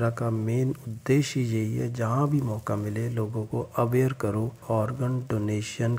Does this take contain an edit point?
yes; 1 cut; at 4.6 s

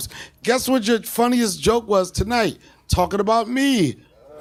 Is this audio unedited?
yes; 0 cuts

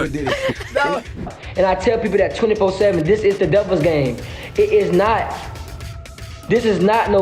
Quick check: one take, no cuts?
no; 1 cut; at 1.3 s

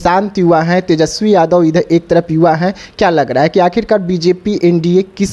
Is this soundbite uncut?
yes; 0 cuts

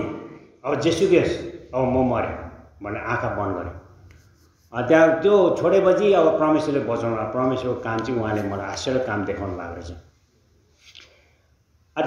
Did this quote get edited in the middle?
no; 0 cuts

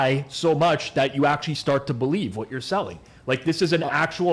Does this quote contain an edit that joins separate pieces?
no; 0 cuts

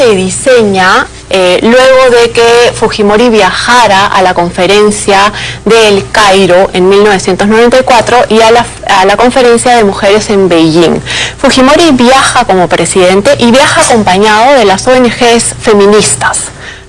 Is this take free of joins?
yes; 0 cuts

